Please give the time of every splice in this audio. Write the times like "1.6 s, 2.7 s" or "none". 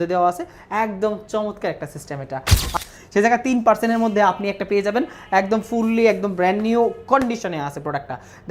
2.7 s

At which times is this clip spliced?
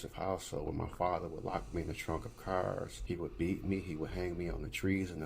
3.0 s

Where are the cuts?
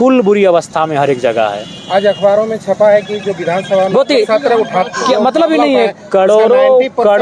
none

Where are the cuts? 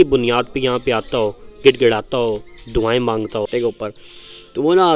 3.5 s

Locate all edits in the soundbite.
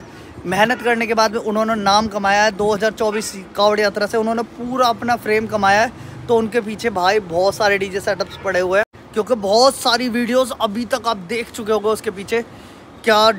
9.0 s

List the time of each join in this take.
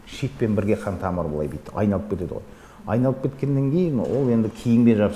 none

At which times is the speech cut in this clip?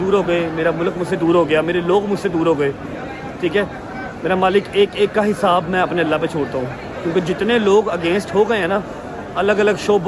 none

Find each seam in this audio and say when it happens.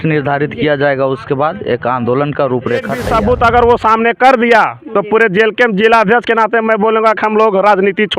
3.0 s

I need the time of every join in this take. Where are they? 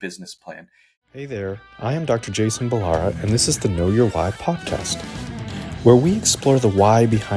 1.1 s

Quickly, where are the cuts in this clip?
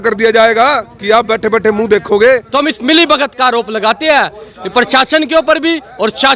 2.5 s

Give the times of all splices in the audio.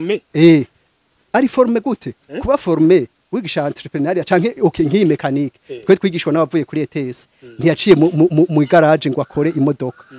none

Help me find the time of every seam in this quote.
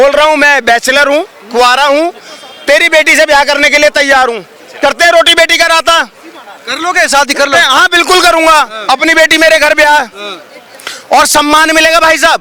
none

